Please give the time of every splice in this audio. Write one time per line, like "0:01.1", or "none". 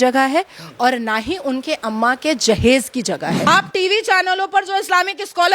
0:03.4